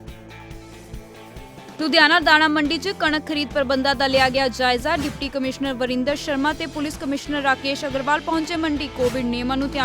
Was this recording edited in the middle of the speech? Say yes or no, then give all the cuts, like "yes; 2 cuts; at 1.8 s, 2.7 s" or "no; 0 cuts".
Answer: yes; 1 cut; at 1.5 s